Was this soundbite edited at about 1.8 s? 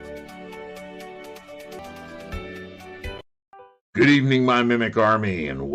yes; 1 cut; at 1.8 s

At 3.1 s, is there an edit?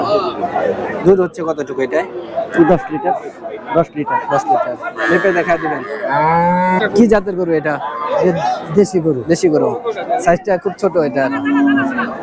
no; 1 cut; at 6.8 s

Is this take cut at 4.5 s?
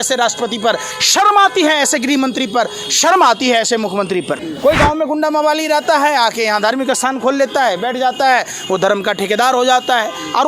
yes; 1 cut; at 4.5 s

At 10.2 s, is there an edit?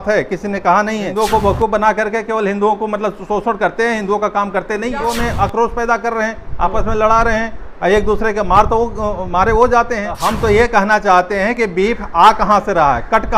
yes; 3 cuts; at 1.1 s, 5.0 s, 10.2 s

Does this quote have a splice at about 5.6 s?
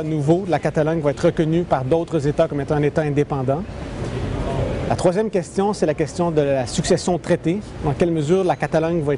yes; 1 cut; at 5.6 s

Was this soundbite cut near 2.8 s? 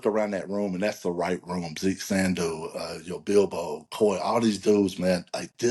no; 0 cuts

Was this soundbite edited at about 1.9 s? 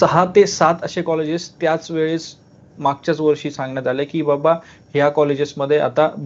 no; 0 cuts

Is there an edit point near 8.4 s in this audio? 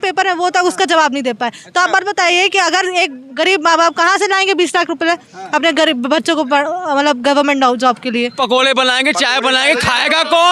yes; 1 cut; at 8.4 s

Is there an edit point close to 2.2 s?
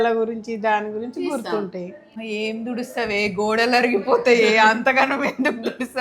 yes; 1 cut; at 2.2 s

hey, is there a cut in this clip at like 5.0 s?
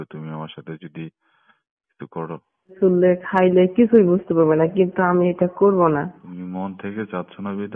no; 2 cuts; at 2.8 s, 6.2 s

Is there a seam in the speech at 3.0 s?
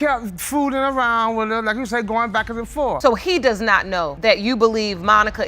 yes; 1 cut; at 3.0 s

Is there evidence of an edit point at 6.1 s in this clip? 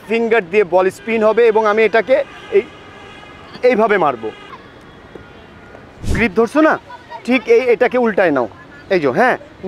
yes; 1 cut; at 6.1 s

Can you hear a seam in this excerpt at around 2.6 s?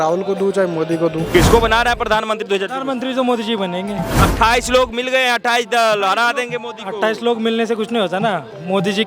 no; 2 cuts; at 1.3 s, 4.2 s

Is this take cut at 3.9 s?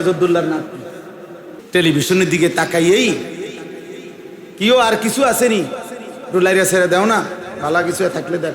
no; 1 cut; at 1.6 s

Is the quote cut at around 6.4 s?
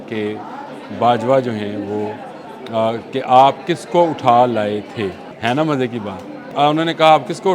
yes; 2 cuts; at 5.3 s, 6.4 s

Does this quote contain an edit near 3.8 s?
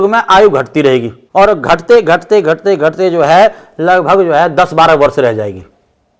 no; 1 cut; at 1.2 s

